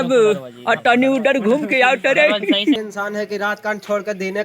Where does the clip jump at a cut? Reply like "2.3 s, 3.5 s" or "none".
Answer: 2.8 s